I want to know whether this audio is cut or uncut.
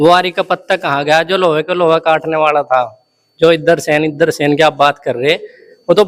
uncut